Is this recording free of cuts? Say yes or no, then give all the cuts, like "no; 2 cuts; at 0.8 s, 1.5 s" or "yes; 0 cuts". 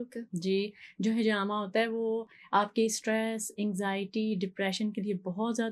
yes; 0 cuts